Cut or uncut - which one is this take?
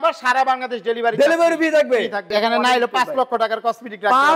cut